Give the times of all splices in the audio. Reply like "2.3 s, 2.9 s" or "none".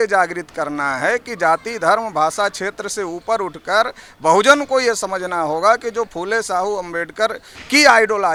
none